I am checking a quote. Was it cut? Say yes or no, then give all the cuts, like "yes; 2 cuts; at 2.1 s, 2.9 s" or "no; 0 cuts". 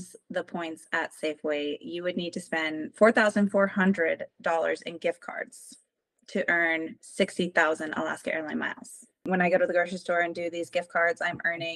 yes; 1 cut; at 9.3 s